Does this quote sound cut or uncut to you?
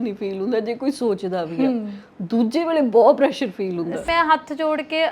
cut